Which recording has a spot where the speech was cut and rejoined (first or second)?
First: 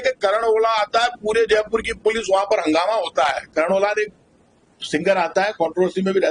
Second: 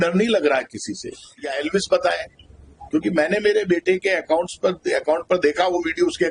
second